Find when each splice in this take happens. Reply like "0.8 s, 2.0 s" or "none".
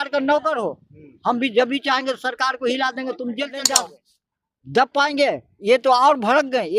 3.8 s